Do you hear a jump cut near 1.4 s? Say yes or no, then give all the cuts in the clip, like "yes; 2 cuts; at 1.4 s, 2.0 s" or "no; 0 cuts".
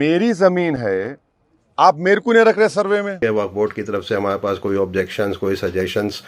no; 1 cut; at 3.2 s